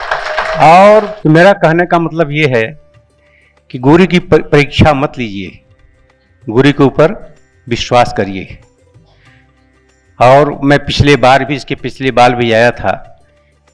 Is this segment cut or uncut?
cut